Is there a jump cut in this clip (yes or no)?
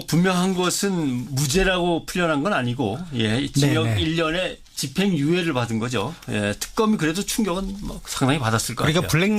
yes